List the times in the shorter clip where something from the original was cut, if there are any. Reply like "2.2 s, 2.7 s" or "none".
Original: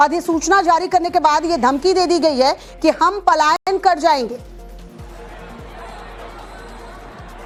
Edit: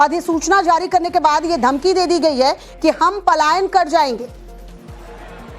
3.6 s